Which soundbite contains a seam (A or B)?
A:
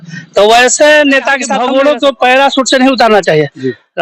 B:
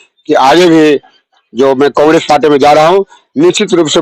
A